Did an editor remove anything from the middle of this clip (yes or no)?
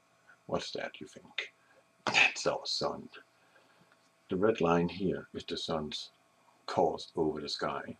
yes